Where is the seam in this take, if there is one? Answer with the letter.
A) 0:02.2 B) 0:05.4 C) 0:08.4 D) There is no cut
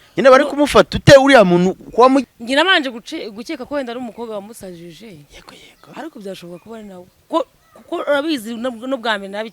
A